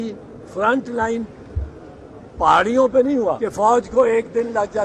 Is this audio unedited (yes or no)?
no